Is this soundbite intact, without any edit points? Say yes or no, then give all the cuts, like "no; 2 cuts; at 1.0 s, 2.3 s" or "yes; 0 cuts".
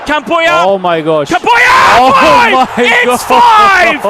yes; 0 cuts